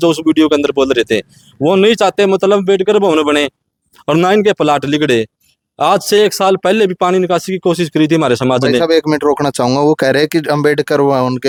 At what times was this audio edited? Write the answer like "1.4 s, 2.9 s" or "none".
none